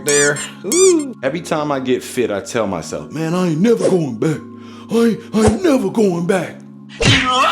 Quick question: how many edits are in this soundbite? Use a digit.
1